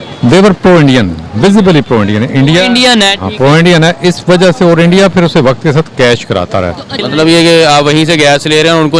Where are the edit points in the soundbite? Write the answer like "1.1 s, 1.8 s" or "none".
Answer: 7.0 s